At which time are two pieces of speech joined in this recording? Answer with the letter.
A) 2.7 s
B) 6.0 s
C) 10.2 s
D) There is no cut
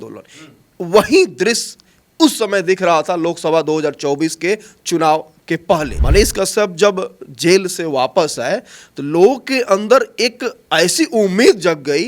B